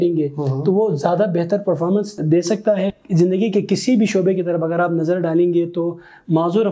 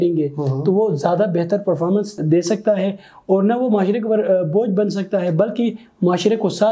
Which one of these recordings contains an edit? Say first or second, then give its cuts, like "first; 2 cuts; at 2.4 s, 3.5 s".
first; 1 cut; at 3.0 s